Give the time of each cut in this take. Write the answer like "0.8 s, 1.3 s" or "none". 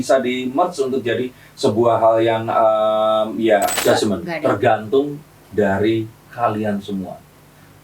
3.8 s